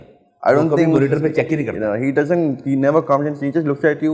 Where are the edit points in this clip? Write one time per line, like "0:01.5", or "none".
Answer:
none